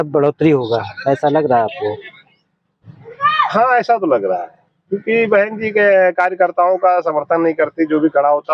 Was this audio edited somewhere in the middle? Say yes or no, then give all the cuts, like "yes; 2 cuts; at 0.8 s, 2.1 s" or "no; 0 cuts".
no; 0 cuts